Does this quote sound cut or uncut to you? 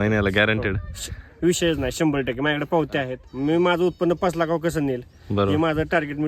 cut